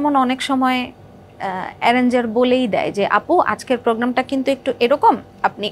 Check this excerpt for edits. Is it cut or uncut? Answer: uncut